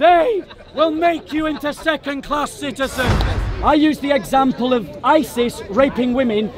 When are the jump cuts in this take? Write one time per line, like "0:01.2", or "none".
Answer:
0:03.3